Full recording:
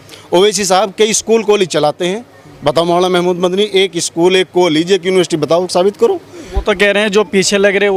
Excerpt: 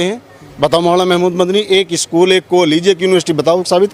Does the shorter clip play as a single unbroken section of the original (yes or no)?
yes